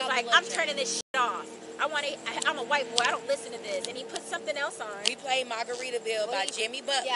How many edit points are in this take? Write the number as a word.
zero